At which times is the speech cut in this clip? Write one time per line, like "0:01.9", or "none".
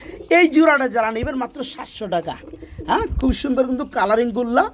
none